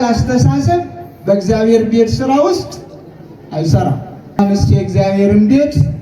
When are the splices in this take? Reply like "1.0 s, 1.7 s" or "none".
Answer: 4.4 s